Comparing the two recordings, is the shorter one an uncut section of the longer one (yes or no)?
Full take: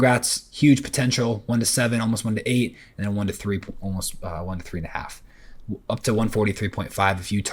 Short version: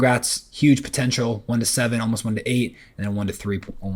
yes